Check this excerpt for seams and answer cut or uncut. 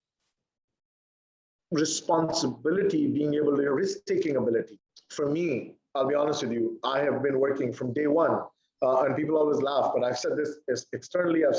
cut